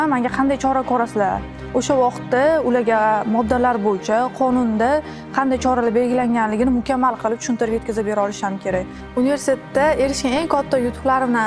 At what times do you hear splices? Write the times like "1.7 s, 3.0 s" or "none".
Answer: 9.0 s